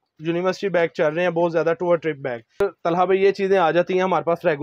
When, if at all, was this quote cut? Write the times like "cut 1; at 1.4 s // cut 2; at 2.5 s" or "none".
cut 1; at 2.6 s